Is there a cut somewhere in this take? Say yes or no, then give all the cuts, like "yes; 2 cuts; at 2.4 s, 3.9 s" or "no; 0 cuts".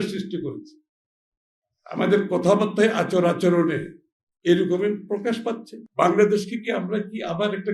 yes; 1 cut; at 5.8 s